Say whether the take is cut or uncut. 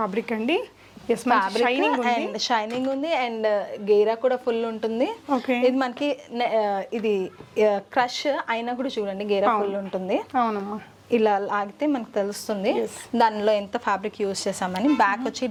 uncut